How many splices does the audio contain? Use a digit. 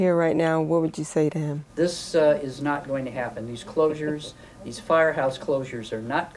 1